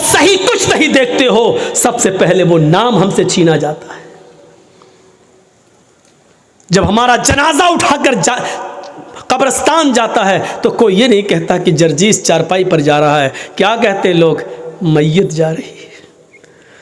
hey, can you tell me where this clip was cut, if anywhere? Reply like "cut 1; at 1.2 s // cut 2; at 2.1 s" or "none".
none